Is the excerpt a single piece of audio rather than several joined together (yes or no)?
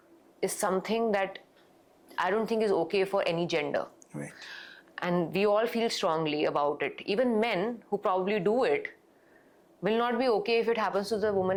yes